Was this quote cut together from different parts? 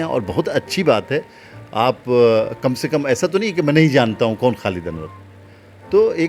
no; 0 cuts

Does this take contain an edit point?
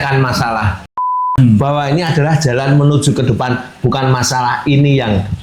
yes; 1 cut; at 1.0 s

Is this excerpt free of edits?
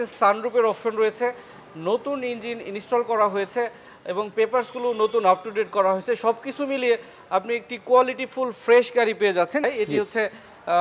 no; 1 cut; at 9.6 s

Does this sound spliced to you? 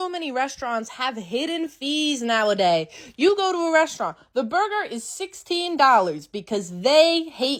no; 0 cuts

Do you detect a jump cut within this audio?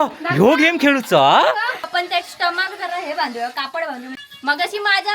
yes; 2 cuts; at 1.9 s, 4.2 s

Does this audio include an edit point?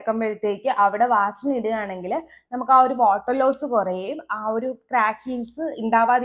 no; 0 cuts

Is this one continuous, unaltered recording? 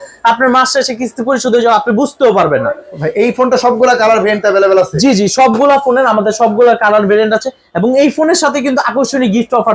yes; 0 cuts

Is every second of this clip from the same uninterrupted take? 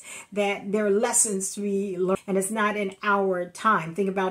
no; 1 cut; at 2.2 s

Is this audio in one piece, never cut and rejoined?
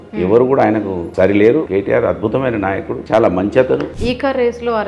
no; 2 cuts; at 1.7 s, 3.9 s

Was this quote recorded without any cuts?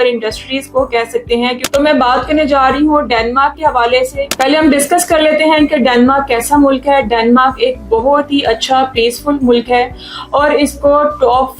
no; 2 cuts; at 1.6 s, 4.3 s

